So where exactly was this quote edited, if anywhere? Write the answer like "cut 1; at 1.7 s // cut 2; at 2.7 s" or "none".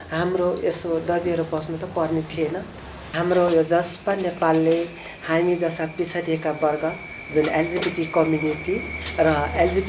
cut 1; at 3.1 s